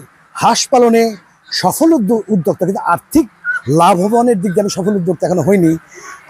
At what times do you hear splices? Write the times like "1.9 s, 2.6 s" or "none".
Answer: none